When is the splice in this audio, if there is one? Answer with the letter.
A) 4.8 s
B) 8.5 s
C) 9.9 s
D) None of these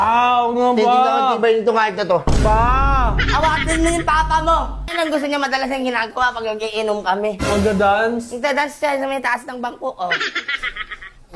A